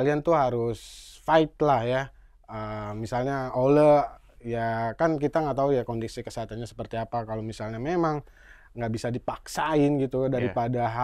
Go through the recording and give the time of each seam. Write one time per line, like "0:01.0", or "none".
none

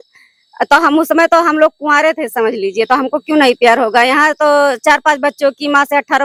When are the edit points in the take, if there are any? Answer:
none

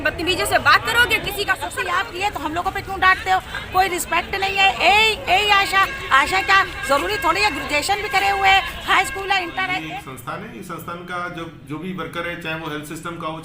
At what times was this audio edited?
0:01.7
0:09.8

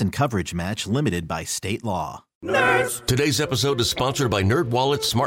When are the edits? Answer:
0:02.3

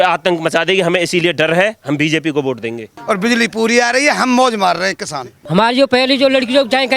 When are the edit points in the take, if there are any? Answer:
0:02.9
0:05.4

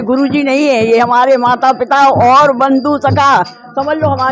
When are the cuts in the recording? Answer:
none

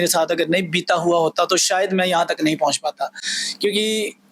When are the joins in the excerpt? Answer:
none

